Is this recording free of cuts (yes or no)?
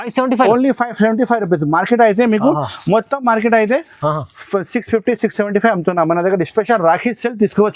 yes